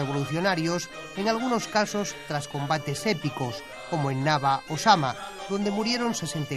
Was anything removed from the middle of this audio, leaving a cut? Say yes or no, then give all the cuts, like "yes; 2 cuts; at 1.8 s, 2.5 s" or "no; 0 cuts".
no; 0 cuts